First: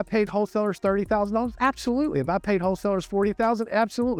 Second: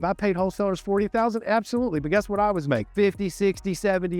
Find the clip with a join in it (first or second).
second